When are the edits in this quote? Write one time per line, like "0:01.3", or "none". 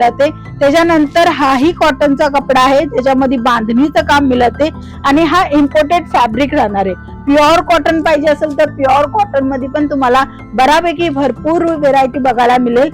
none